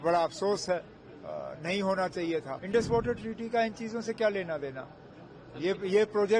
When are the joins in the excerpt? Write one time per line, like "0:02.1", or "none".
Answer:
0:02.6